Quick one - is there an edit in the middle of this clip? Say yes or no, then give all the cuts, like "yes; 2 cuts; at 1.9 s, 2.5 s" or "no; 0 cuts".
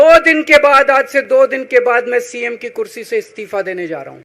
no; 0 cuts